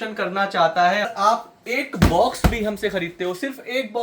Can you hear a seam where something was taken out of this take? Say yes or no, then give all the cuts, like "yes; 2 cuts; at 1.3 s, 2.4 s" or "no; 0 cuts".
yes; 1 cut; at 1.1 s